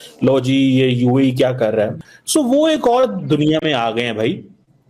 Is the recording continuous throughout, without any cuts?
no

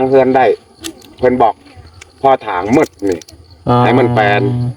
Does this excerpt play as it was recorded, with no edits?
yes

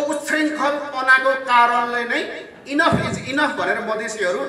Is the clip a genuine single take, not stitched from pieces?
yes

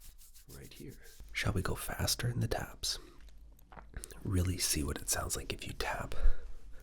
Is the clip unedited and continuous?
no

